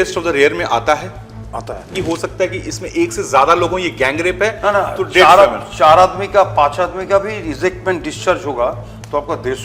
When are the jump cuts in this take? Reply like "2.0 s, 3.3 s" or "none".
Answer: 1.9 s